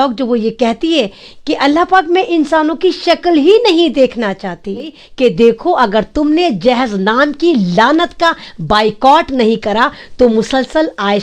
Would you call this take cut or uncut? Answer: cut